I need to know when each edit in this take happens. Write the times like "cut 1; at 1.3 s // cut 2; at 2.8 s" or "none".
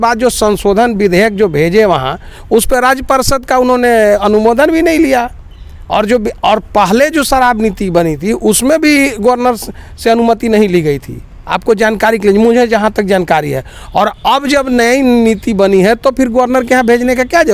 none